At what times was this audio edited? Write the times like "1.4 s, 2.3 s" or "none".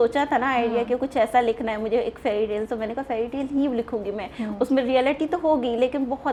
none